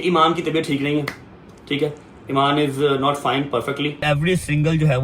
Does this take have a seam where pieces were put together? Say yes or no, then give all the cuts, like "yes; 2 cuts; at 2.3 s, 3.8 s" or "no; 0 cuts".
yes; 1 cut; at 4.0 s